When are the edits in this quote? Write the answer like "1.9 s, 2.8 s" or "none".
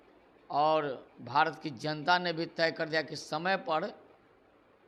none